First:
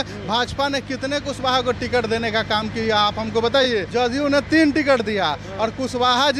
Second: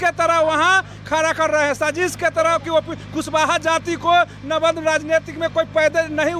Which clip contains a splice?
first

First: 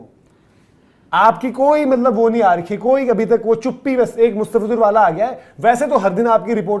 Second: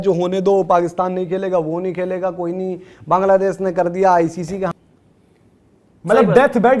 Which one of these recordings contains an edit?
second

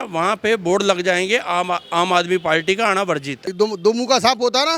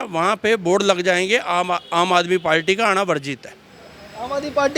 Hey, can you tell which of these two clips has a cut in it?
first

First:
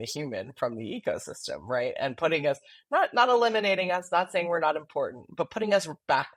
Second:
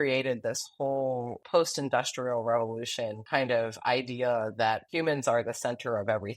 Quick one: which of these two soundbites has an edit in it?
second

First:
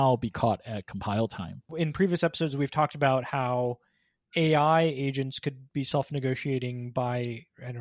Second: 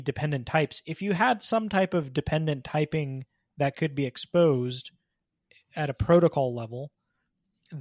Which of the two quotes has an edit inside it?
first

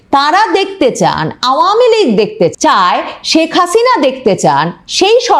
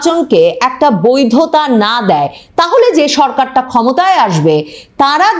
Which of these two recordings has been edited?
first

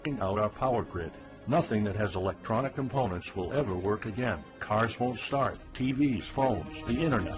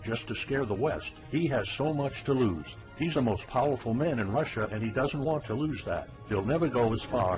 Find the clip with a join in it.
first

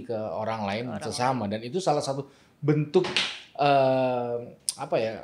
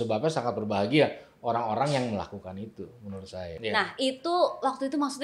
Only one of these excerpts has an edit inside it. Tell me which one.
second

